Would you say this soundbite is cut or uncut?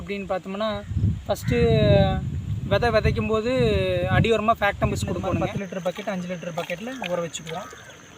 cut